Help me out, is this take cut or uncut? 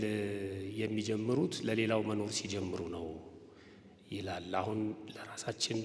uncut